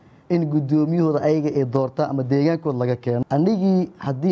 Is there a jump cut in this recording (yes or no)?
yes